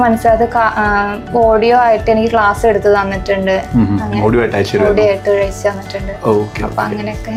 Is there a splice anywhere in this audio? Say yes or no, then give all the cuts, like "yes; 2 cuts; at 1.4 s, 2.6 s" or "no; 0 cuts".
no; 0 cuts